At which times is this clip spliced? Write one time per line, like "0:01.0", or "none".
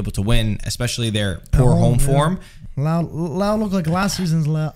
0:02.6